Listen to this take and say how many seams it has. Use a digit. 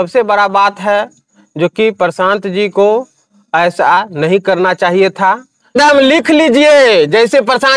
1